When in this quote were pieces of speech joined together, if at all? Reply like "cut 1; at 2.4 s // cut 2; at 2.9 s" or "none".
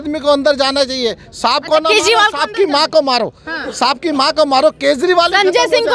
none